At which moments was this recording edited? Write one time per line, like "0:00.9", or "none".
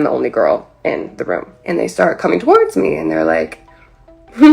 0:01.5